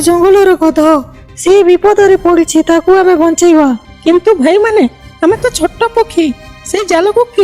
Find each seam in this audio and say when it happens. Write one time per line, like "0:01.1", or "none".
0:01.2
0:03.9